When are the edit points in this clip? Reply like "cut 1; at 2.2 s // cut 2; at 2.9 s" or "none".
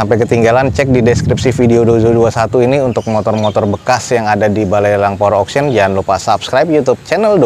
none